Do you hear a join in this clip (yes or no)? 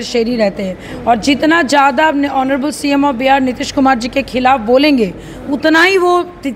no